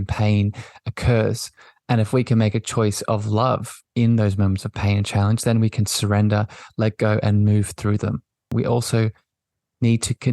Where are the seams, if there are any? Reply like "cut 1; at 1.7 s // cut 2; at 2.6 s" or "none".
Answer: cut 1; at 8.5 s

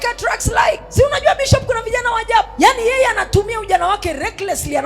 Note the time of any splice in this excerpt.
cut 1; at 0.9 s // cut 2; at 2.5 s

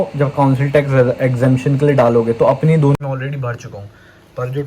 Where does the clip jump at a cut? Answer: cut 1; at 2.9 s

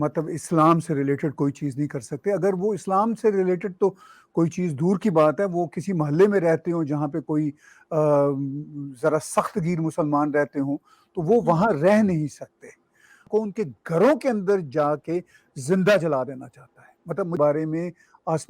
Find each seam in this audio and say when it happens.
cut 1; at 13.2 s // cut 2; at 17.4 s

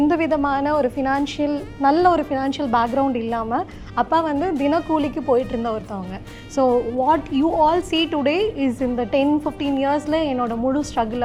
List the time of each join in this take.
none

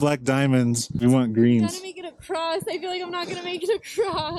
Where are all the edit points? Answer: none

